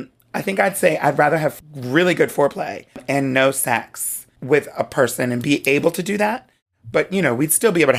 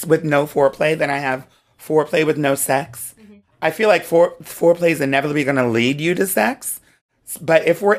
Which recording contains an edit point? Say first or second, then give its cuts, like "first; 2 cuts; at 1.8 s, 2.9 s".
first; 3 cuts; at 1.6 s, 3.0 s, 4.3 s